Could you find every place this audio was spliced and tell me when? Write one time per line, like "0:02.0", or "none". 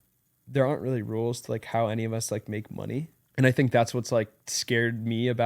0:03.2